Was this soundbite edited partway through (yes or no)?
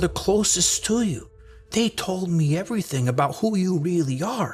no